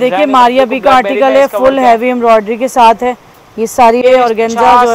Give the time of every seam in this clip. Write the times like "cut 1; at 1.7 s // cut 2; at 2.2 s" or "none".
cut 1; at 4.0 s